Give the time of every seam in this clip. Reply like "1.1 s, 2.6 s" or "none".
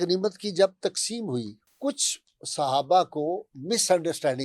1.6 s